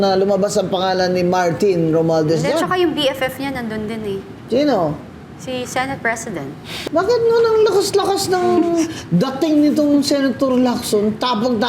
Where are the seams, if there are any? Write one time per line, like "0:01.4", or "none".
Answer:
0:06.7